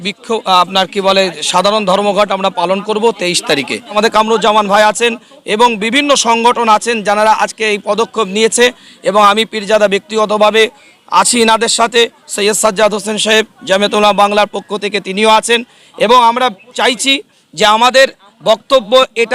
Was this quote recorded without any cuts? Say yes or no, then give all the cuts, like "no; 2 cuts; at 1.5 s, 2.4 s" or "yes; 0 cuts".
no; 1 cut; at 3.9 s